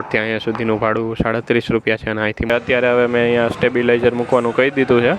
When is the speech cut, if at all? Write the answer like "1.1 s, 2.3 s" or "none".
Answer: 2.5 s